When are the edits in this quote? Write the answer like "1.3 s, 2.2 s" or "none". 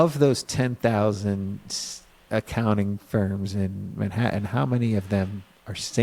none